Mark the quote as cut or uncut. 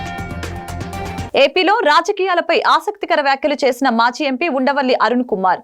cut